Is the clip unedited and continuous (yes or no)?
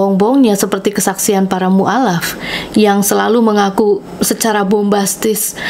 yes